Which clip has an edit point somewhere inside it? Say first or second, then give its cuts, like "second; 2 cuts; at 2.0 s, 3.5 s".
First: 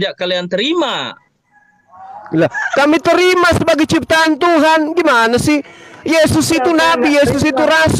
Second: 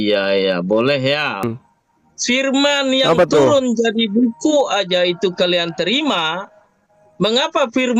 second; 1 cut; at 1.4 s